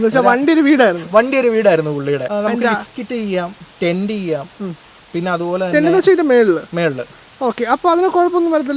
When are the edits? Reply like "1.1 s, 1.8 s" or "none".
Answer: 2.3 s